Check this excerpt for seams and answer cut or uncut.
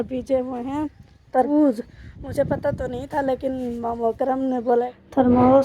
cut